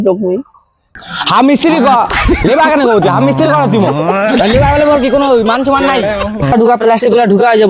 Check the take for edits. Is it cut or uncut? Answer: cut